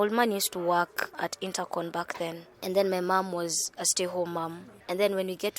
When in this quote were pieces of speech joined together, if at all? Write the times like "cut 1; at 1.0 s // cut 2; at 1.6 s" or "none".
cut 1; at 1.1 s // cut 2; at 4.7 s

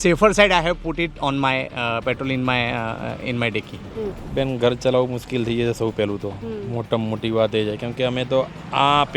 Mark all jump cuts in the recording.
cut 1; at 4.2 s

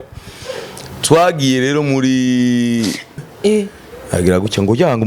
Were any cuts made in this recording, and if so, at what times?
cut 1; at 3.2 s

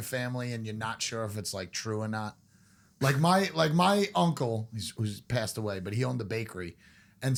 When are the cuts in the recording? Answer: none

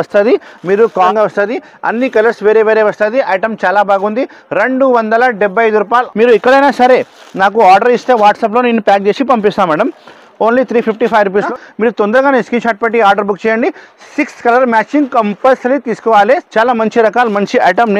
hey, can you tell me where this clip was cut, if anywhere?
cut 1; at 1.1 s // cut 2; at 6.1 s // cut 3; at 11.5 s // cut 4; at 16.5 s

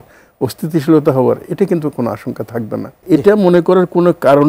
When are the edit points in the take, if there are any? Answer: cut 1; at 3.0 s

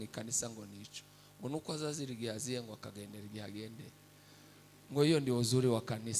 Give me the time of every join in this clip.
none

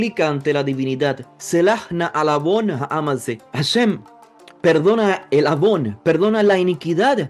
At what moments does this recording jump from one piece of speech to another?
none

